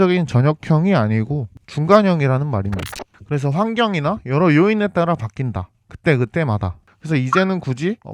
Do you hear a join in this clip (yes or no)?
yes